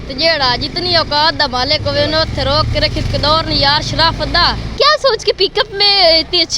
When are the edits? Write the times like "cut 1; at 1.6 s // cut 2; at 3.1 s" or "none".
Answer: cut 1; at 4.7 s